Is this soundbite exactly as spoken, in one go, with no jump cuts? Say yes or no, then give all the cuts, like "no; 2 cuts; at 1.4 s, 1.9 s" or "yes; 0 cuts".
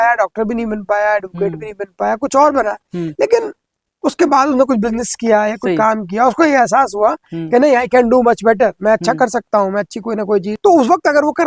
no; 1 cut; at 10.6 s